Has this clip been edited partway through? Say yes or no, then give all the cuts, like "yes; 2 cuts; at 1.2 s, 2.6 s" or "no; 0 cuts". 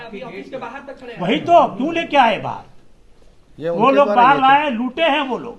no; 0 cuts